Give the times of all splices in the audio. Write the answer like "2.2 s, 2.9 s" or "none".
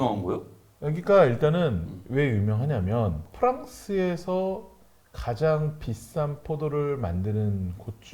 3.3 s